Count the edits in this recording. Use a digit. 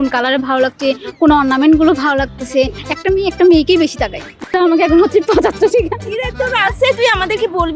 1